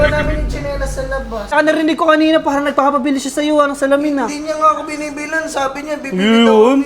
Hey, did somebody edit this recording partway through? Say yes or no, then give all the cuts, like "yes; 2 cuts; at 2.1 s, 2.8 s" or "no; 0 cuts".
yes; 1 cut; at 1.5 s